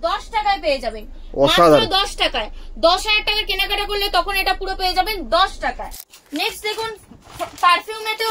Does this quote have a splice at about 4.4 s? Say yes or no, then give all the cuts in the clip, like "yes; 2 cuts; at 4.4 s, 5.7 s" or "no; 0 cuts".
no; 1 cut; at 6.0 s